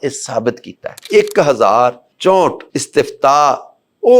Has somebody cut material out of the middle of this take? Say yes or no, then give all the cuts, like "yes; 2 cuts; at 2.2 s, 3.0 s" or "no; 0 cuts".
yes; 3 cuts; at 1.0 s, 2.1 s, 2.7 s